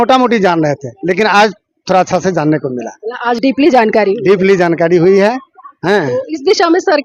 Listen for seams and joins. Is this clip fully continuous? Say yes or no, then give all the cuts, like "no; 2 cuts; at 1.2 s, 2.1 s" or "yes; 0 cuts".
yes; 0 cuts